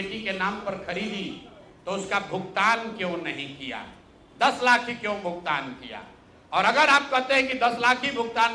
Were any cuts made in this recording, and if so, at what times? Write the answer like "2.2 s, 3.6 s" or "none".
none